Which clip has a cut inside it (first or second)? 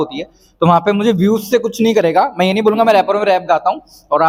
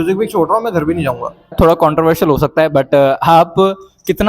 second